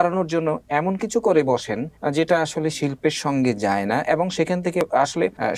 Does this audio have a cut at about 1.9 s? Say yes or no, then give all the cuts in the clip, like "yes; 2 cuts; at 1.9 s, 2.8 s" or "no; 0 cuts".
yes; 2 cuts; at 1.9 s, 4.8 s